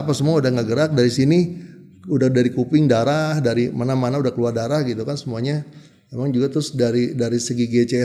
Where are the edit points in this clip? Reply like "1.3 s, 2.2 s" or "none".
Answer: none